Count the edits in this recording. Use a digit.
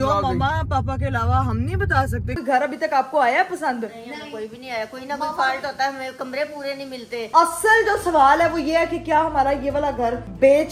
2